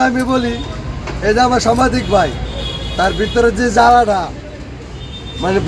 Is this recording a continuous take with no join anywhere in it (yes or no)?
yes